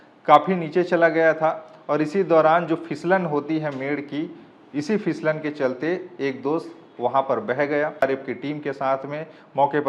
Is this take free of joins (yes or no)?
no